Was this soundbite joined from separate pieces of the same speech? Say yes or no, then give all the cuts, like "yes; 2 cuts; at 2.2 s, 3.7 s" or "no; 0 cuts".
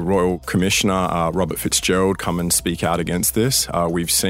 no; 0 cuts